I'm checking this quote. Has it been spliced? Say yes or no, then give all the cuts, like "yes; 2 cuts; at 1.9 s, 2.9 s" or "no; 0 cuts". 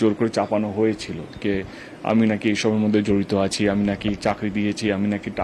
no; 0 cuts